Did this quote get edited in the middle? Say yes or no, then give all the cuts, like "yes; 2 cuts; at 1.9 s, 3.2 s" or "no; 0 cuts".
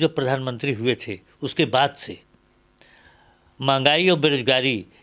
no; 0 cuts